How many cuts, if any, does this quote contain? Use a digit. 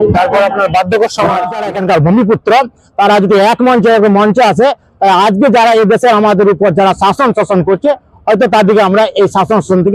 1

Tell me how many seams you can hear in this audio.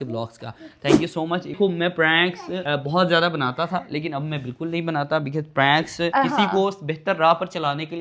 2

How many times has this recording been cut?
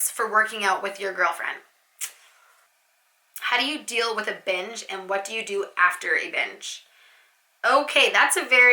1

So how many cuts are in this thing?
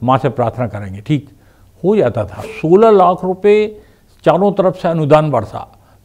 1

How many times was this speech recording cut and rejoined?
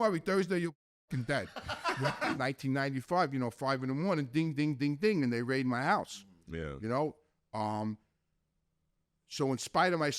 1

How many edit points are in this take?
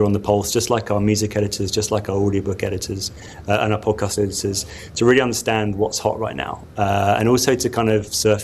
0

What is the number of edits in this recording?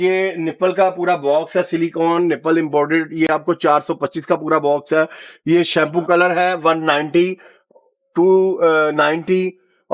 0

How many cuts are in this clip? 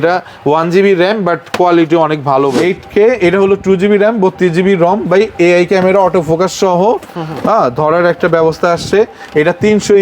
1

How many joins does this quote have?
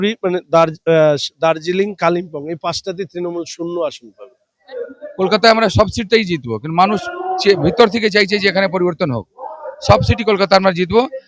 1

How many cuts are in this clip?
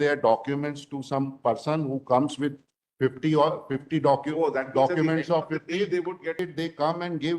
1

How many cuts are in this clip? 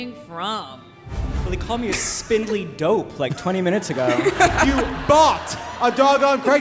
2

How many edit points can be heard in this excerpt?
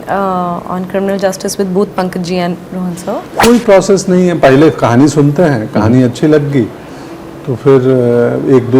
1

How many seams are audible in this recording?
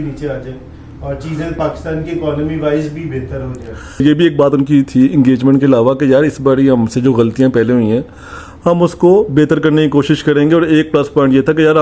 1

